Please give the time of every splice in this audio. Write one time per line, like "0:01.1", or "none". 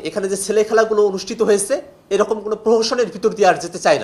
none